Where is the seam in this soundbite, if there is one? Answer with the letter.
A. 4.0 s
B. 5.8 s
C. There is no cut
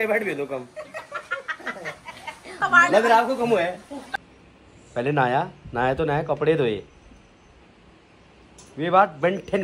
A